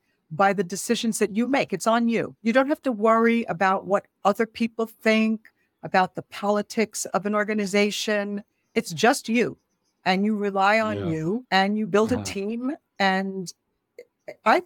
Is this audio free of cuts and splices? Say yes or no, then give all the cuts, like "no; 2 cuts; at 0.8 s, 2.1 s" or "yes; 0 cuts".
no; 3 cuts; at 2.3 s, 8.7 s, 11.4 s